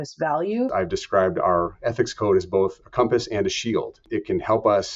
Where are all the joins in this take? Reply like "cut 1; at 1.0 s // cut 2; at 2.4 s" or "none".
cut 1; at 0.7 s // cut 2; at 4.0 s